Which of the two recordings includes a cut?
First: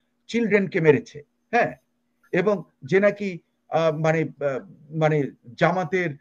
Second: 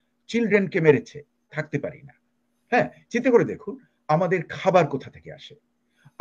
second; 1 cut; at 1.5 s

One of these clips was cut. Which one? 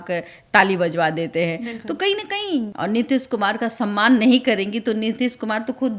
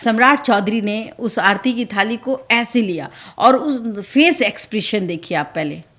first; 1 cut; at 2.7 s

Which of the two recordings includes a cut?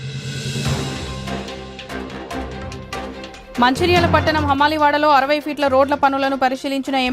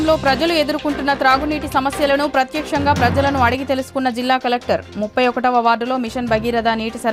first; 1 cut; at 1.0 s

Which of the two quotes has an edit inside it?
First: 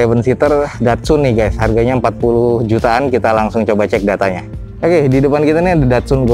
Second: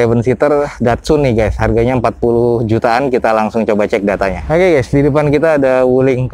second; 1 cut; at 4.4 s

